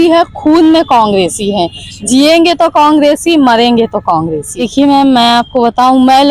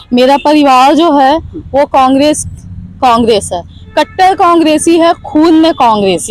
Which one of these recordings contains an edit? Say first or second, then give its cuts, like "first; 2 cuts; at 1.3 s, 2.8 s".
first; 1 cut; at 4.7 s